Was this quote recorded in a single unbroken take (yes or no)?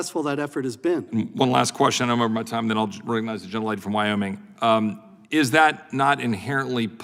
yes